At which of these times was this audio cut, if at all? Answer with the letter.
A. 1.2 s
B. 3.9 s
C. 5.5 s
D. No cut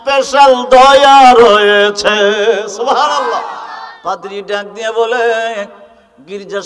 B